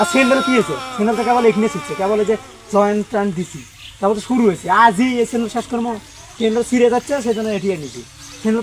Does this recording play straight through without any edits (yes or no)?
yes